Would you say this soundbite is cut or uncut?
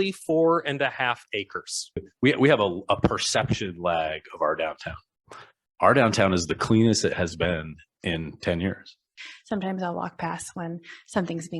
cut